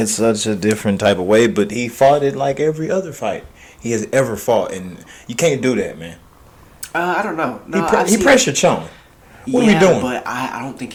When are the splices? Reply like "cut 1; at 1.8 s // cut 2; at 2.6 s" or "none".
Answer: none